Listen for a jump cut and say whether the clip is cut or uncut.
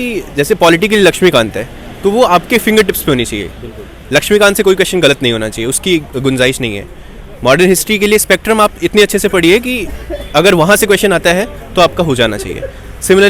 uncut